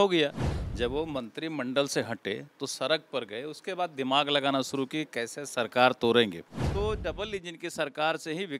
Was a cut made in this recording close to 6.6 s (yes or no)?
yes